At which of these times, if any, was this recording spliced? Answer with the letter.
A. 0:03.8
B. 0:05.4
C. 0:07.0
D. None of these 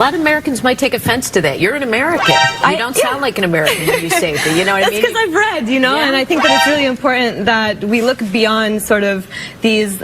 A